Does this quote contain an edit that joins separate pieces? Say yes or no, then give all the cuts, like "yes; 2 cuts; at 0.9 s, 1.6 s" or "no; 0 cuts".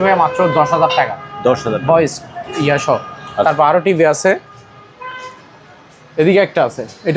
no; 0 cuts